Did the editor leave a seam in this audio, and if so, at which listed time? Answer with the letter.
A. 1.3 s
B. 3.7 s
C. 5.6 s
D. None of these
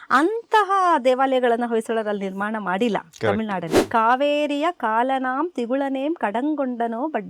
B